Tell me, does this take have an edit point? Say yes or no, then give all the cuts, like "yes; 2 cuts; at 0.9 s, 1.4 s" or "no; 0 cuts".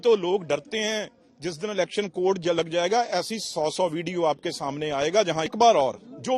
yes; 1 cut; at 5.5 s